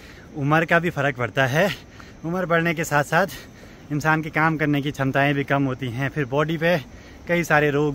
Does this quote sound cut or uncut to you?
uncut